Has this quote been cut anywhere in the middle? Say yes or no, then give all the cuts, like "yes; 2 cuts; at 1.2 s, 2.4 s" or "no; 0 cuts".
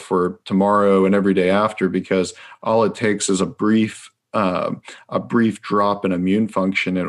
no; 0 cuts